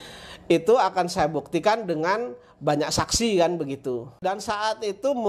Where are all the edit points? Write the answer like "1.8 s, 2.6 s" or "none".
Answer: 4.2 s